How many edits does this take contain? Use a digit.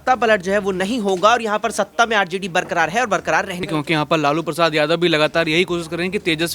1